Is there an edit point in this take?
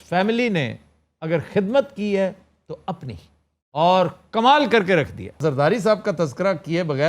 yes; 1 cut; at 5.4 s

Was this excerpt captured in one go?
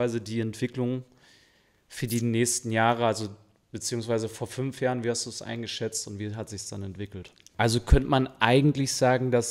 no; 1 cut; at 7.4 s

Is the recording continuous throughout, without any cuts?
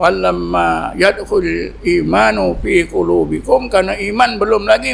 yes; 0 cuts

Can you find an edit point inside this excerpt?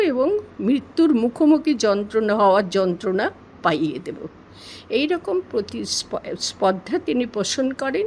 no; 0 cuts

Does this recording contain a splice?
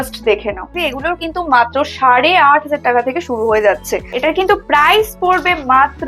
yes; 2 cuts; at 0.9 s, 4.1 s

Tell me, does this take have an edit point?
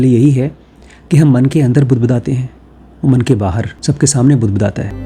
no; 0 cuts

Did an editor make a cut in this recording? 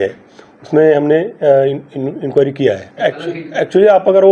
yes; 1 cut; at 2.9 s

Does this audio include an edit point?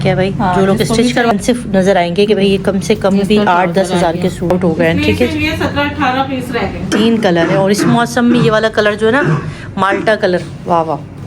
yes; 3 cuts; at 1.3 s, 4.5 s, 6.8 s

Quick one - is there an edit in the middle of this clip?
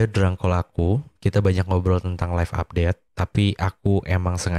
yes; 1 cut; at 3.1 s

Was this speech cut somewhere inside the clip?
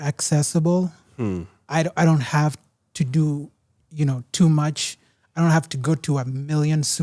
no; 0 cuts

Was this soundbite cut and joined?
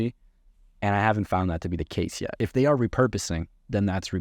yes; 1 cut; at 2.3 s

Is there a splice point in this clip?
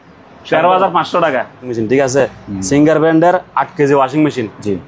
yes; 1 cut; at 1.7 s

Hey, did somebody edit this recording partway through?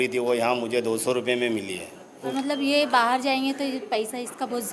yes; 1 cut; at 2.3 s

